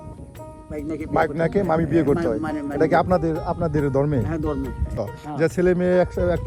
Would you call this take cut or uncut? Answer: cut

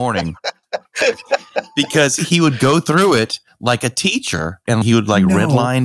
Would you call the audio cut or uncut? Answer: cut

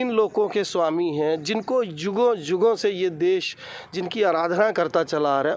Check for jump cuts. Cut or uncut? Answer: uncut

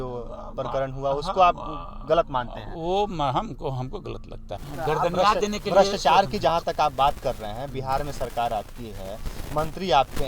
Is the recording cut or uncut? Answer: cut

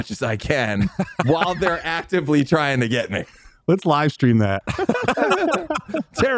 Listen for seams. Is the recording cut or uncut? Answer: uncut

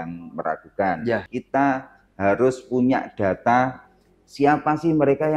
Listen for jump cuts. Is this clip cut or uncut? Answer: cut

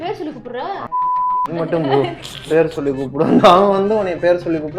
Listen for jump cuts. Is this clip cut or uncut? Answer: uncut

